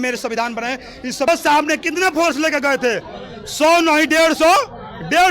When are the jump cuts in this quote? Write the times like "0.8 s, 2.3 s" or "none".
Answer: 1.3 s